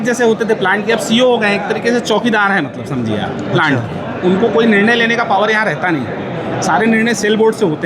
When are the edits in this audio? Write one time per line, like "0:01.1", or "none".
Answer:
none